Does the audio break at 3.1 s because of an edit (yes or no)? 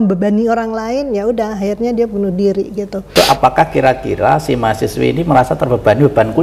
yes